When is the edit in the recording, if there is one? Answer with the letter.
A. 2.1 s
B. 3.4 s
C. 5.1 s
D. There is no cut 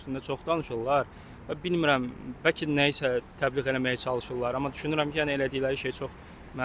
D